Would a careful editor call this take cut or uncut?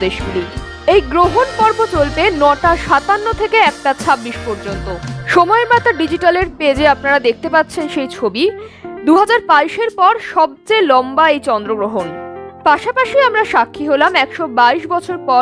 cut